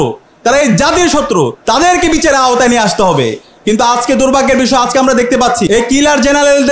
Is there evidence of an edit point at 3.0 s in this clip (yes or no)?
no